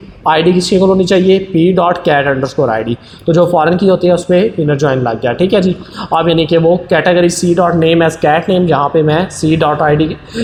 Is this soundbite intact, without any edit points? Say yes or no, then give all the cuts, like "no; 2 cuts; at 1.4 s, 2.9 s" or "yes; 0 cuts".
yes; 0 cuts